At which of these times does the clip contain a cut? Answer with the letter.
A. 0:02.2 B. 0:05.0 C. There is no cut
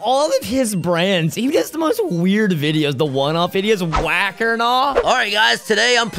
B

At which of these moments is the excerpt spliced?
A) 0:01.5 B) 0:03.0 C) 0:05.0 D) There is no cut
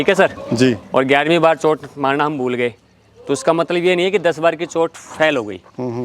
D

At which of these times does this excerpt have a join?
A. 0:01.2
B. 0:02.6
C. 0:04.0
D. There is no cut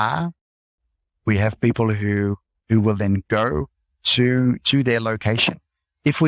D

